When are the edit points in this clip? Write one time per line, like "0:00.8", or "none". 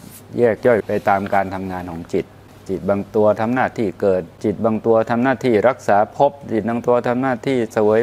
0:02.5
0:04.4